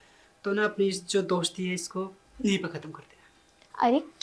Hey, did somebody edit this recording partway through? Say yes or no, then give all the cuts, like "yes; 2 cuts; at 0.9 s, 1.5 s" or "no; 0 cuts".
yes; 1 cut; at 2.2 s